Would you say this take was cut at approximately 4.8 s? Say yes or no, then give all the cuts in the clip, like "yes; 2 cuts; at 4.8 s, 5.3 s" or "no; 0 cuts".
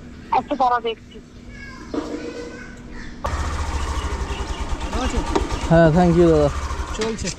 no; 1 cut; at 3.3 s